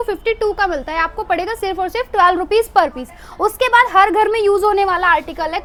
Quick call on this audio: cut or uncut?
uncut